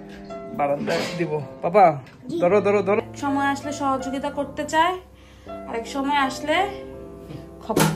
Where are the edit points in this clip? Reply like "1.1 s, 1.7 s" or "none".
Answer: 3.0 s